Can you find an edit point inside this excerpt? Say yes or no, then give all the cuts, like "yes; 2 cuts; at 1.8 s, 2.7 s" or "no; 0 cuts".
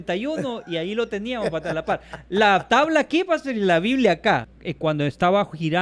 yes; 1 cut; at 4.5 s